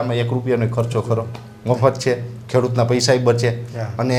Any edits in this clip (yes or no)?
no